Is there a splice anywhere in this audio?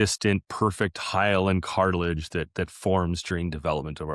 no; 0 cuts

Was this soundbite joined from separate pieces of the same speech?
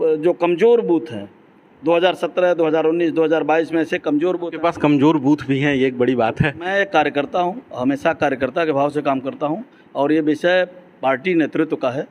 yes; 2 cuts; at 4.5 s, 6.7 s

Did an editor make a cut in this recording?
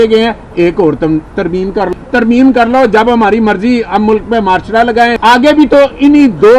yes; 2 cuts; at 1.9 s, 5.2 s

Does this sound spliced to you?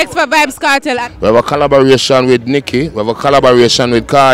yes; 1 cut; at 1.0 s

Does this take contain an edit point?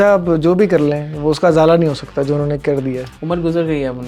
no; 0 cuts

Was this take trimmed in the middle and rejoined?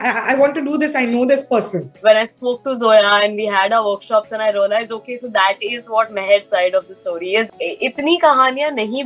yes; 2 cuts; at 1.8 s, 7.5 s

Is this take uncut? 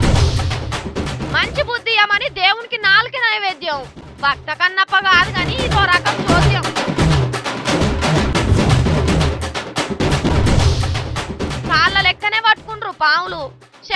no; 1 cut; at 1.1 s

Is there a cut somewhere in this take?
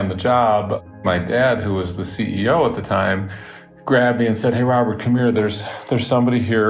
yes; 1 cut; at 0.9 s

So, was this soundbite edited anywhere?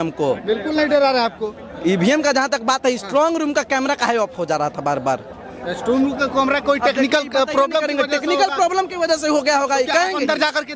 no; 0 cuts

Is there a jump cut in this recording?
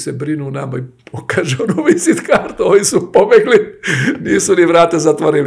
no; 0 cuts

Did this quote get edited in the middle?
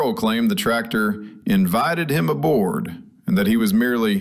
no; 0 cuts

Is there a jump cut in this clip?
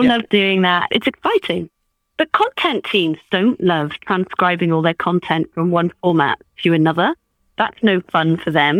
yes; 2 cuts; at 0.9 s, 7.4 s

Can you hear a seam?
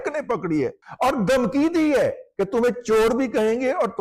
no; 0 cuts

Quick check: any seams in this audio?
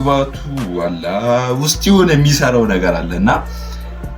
no; 0 cuts

